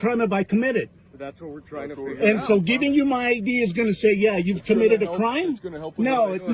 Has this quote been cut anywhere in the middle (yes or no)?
no